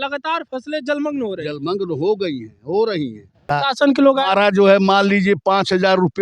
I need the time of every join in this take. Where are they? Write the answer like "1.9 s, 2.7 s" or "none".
3.5 s